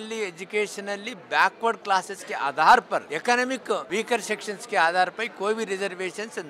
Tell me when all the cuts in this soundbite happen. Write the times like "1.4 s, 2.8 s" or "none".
3.1 s, 3.8 s